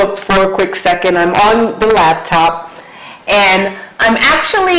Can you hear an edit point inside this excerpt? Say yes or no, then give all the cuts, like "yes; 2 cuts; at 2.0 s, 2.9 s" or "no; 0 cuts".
yes; 1 cut; at 3.8 s